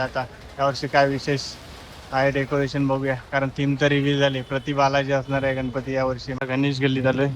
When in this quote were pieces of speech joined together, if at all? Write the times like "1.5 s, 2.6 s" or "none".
6.3 s